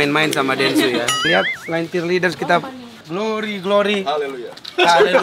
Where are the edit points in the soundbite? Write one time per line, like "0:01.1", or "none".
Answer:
0:01.2
0:03.0